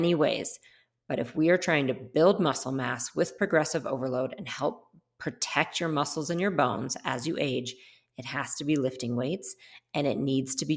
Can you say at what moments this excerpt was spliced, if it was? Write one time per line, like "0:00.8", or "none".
none

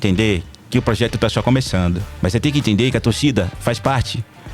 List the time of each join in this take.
0:02.1

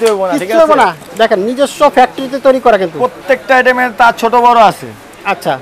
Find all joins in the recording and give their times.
0:01.0

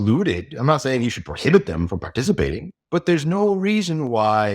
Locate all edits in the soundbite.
0:02.7

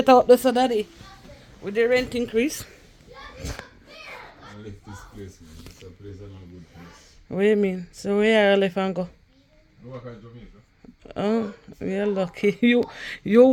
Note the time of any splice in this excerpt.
none

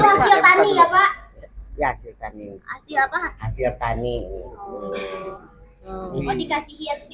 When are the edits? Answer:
none

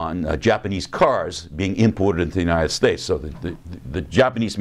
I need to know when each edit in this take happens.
0:02.9

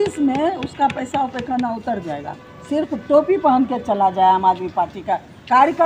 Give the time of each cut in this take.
none

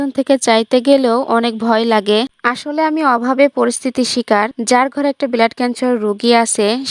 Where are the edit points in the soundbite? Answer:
0:02.3

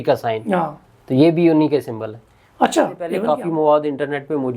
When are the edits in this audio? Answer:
0:03.2

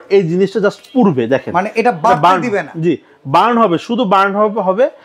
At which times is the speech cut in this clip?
none

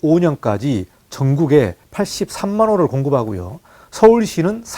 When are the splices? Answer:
0:01.8

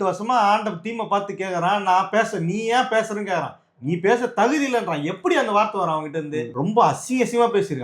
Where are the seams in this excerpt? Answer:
0:06.4

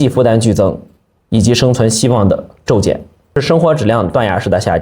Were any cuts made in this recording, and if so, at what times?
0:03.4

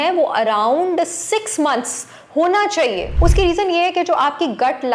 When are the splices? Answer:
0:03.1

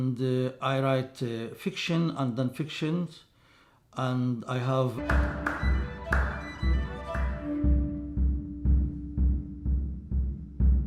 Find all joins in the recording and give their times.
none

